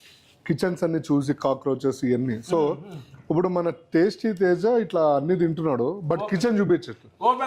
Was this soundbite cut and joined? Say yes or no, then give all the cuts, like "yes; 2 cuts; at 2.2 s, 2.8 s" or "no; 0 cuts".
no; 0 cuts